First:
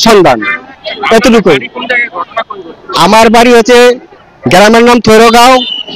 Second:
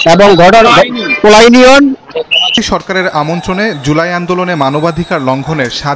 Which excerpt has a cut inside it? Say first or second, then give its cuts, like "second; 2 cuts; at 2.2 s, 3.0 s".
second; 1 cut; at 2.6 s